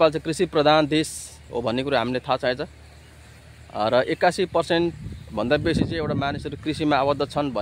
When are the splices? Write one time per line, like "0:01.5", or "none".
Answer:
none